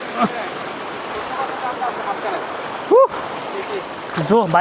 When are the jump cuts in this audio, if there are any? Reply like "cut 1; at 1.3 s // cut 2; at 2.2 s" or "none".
none